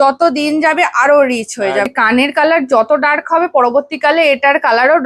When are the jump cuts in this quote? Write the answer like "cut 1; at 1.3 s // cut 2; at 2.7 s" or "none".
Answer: cut 1; at 1.9 s